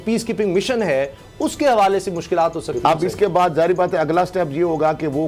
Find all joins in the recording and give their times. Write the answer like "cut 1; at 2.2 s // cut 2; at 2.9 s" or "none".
cut 1; at 3.1 s